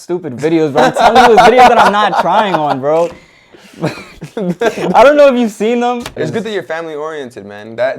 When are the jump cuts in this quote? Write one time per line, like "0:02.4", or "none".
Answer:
0:06.1